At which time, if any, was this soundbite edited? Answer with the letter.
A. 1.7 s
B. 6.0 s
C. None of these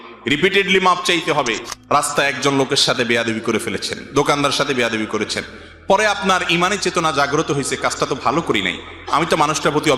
A